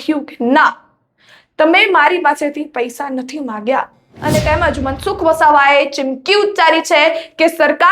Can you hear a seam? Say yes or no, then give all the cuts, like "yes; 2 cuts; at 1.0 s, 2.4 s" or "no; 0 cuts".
yes; 1 cut; at 4.2 s